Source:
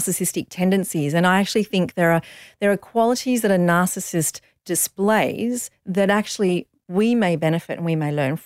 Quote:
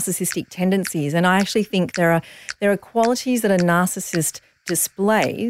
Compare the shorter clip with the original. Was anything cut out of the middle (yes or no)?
no